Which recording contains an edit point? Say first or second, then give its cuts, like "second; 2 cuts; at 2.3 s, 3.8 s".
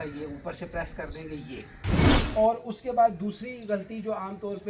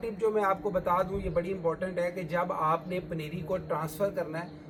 first; 1 cut; at 2.0 s